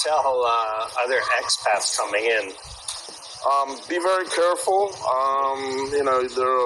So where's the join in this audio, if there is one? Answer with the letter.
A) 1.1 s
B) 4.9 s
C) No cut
B